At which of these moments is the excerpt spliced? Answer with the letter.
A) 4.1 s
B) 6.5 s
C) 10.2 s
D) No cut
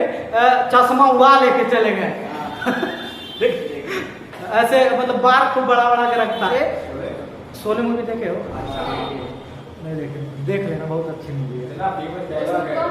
B